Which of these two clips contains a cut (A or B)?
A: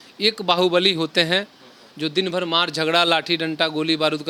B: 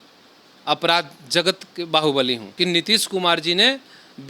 B